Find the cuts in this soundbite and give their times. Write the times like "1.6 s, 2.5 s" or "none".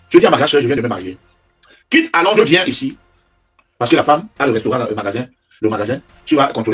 none